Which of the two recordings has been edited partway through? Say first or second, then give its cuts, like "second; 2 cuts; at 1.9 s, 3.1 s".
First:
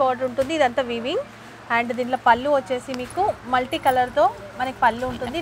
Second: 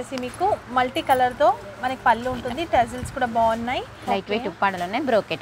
second; 1 cut; at 3.9 s